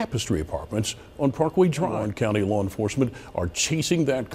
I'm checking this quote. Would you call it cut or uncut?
cut